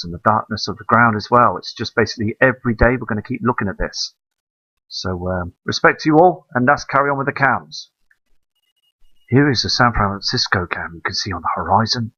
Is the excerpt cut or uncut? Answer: cut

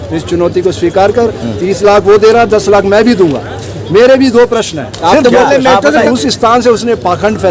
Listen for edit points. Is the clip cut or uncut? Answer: cut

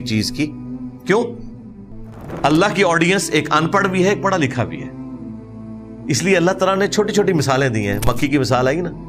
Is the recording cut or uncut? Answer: uncut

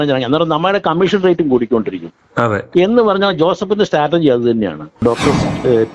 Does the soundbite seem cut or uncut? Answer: cut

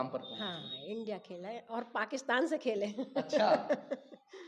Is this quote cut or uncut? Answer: uncut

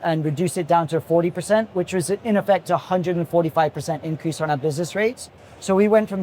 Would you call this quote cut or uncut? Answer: uncut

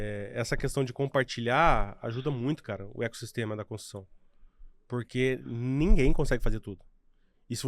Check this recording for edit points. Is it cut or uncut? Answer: uncut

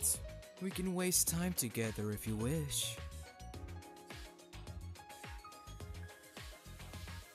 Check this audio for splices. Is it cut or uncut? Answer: uncut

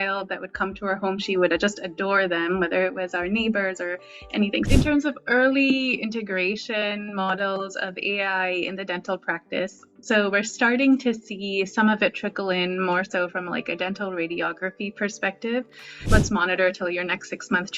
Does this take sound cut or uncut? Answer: cut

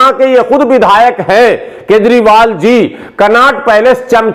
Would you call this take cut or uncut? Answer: uncut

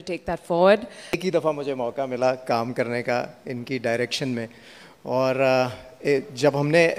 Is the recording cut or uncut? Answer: cut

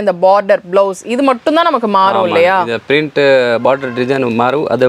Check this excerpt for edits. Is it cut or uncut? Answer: uncut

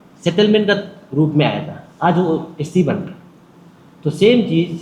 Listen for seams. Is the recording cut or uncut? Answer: uncut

